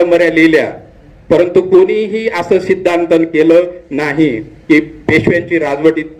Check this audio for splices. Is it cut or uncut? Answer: uncut